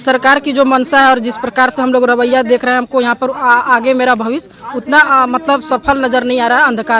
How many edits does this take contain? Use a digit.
0